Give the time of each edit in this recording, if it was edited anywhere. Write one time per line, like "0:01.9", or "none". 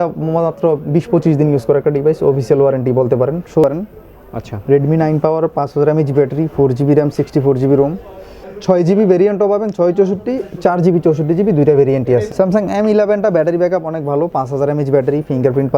0:03.6
0:08.5
0:12.3